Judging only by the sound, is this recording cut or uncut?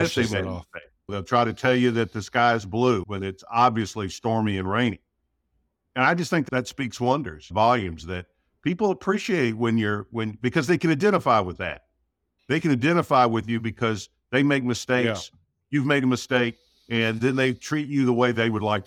uncut